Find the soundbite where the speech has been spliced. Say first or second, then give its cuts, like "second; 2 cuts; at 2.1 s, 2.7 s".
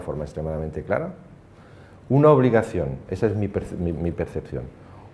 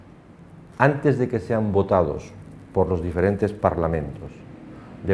second; 1 cut; at 1.4 s